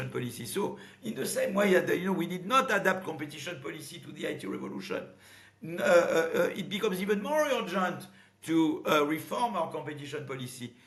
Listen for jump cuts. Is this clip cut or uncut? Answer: uncut